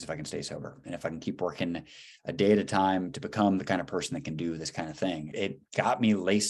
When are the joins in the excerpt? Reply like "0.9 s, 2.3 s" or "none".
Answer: 5.3 s